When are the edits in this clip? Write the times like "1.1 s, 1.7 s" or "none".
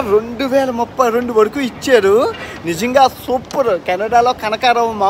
none